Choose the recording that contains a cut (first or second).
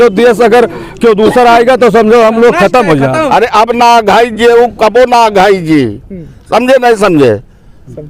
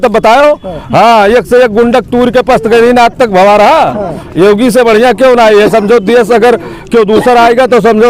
first